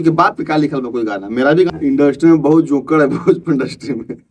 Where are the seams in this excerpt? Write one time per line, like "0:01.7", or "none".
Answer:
0:01.7